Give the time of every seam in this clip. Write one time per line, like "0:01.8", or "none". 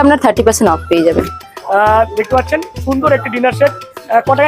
0:01.3